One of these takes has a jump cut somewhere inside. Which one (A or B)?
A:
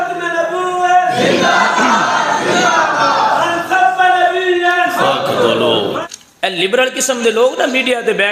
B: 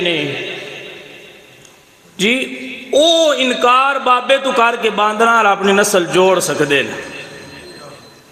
A